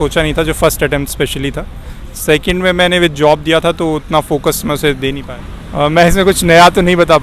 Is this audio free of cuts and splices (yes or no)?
no